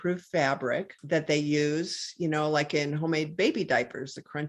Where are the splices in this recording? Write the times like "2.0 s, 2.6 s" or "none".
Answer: 0.9 s